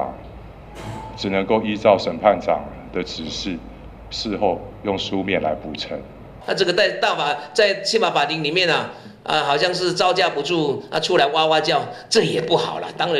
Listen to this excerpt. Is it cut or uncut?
cut